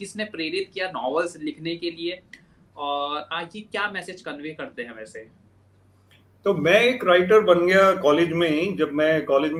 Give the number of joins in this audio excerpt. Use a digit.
0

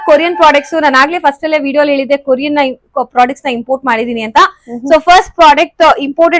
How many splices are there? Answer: 0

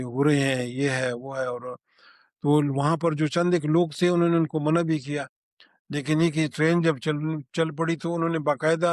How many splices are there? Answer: 0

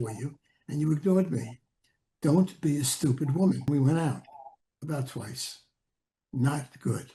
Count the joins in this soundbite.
1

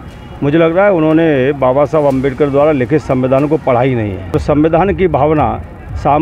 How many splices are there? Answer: 1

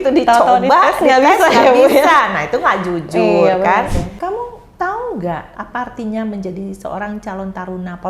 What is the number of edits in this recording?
2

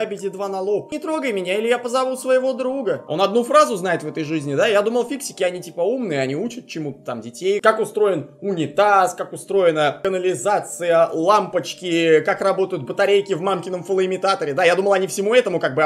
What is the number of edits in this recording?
3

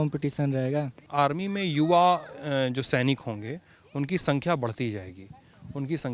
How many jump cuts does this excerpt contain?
1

